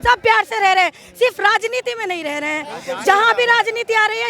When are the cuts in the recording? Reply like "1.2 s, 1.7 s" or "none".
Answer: none